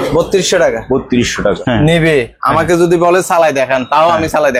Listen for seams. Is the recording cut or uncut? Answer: cut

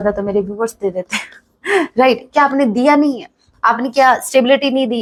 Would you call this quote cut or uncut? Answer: uncut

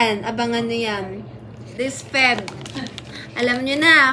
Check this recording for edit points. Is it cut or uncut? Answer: cut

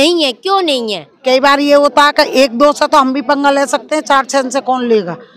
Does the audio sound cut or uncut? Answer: cut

